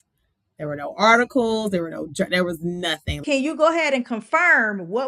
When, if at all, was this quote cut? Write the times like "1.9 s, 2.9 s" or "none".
3.2 s